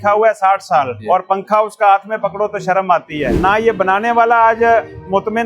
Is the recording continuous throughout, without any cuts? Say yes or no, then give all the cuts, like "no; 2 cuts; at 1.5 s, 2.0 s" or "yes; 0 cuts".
no; 2 cuts; at 1.0 s, 3.3 s